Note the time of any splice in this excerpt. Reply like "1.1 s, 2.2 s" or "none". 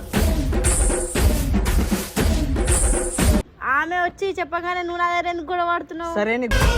3.4 s